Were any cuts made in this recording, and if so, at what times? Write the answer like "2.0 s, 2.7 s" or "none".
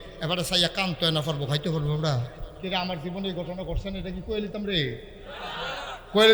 2.4 s

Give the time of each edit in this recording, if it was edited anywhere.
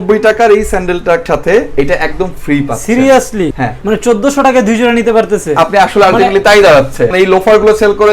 1.2 s, 3.7 s, 7.1 s

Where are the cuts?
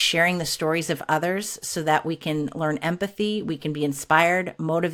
none

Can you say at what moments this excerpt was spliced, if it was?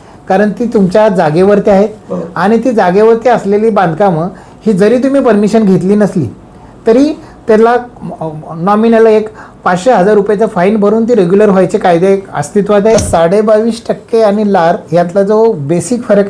13.0 s

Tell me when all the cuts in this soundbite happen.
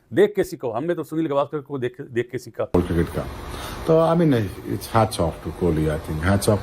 2.7 s

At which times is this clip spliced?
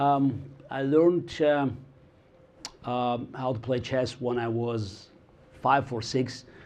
1.1 s

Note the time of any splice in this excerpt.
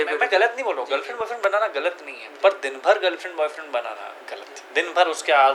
none

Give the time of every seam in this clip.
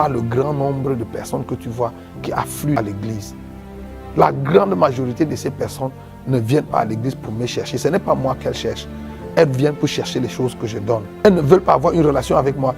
2.8 s, 11.2 s

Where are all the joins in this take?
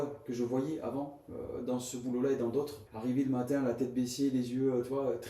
2.8 s

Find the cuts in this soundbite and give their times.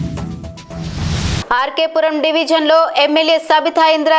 1.4 s

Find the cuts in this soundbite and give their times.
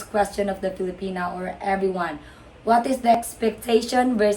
3.3 s

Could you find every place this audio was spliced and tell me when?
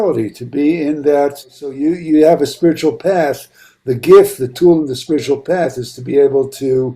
1.8 s

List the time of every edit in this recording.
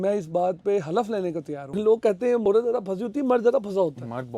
1.7 s

